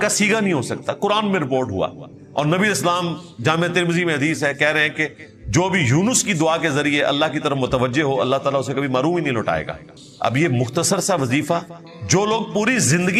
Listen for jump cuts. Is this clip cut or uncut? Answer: uncut